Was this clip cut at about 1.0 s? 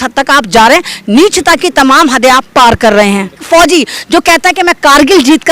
no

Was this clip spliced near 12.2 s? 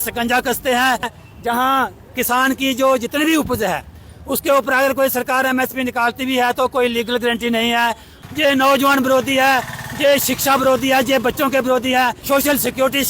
yes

